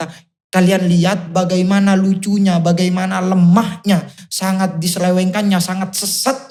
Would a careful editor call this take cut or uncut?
uncut